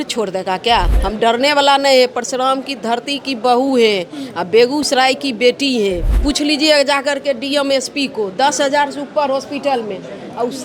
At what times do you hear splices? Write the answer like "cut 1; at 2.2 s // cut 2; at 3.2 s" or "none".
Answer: cut 1; at 0.9 s // cut 2; at 6.1 s